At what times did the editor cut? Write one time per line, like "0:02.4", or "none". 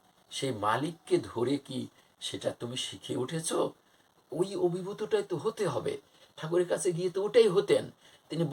0:04.2

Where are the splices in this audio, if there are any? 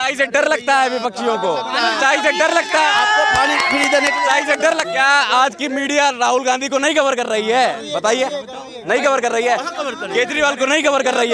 0:04.9

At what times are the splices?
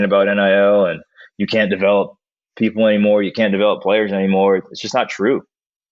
none

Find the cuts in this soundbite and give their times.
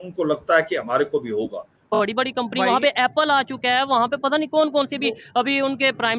0:01.9

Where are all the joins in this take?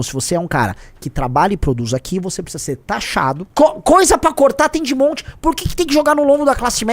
0:03.5

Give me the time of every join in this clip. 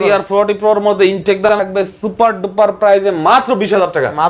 0:01.5

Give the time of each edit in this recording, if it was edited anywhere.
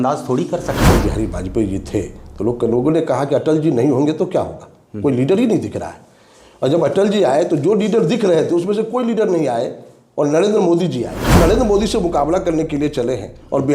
0:00.8
0:11.3

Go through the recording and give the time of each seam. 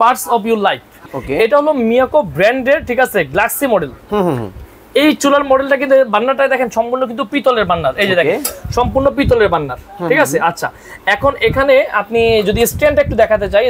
0:01.0

